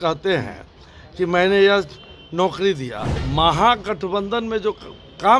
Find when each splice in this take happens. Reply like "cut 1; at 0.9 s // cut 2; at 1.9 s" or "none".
cut 1; at 3.2 s